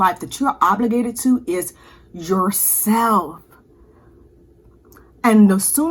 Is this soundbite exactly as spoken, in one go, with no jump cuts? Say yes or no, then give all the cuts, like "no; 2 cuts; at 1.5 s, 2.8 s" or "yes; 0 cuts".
yes; 0 cuts